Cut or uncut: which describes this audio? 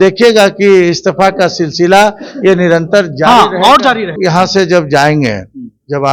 cut